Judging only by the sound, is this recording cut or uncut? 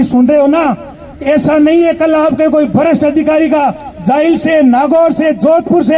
uncut